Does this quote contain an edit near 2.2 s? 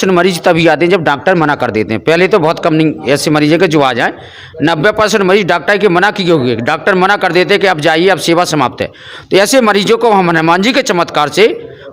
no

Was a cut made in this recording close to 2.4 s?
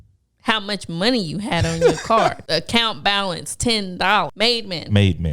yes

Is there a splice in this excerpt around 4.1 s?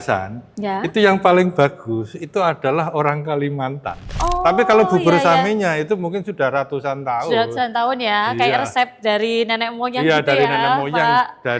yes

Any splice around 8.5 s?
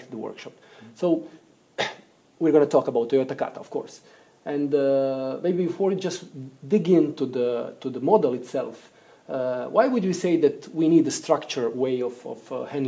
yes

